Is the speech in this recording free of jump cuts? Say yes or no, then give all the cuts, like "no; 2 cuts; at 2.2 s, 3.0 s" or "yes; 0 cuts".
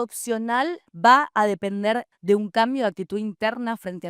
no; 1 cut; at 2.1 s